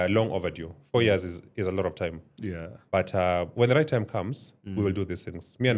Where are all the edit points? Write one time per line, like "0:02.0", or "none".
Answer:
none